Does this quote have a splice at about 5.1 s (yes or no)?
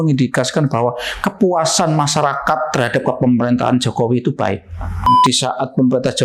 yes